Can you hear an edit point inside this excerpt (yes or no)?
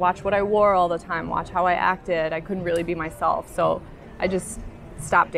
no